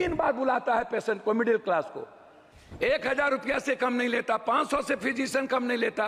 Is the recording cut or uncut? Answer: uncut